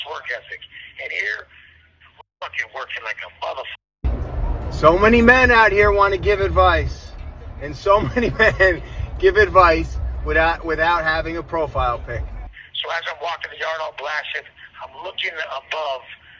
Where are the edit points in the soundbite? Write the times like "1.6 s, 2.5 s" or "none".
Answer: 3.9 s, 12.3 s